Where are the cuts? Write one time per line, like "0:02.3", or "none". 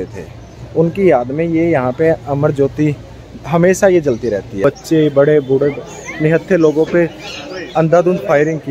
0:04.6

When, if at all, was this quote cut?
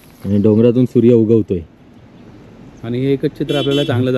none

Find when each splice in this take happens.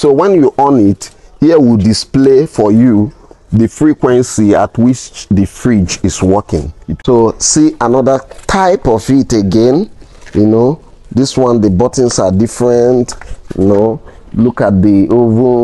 0:06.8

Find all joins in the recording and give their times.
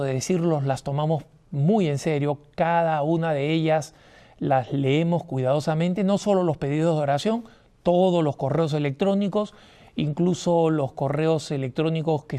none

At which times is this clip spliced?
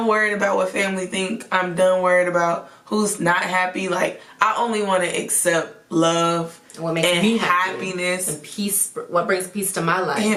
none

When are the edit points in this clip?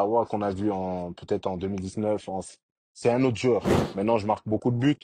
0:03.7

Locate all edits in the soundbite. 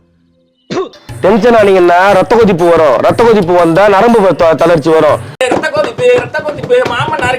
0:01.0

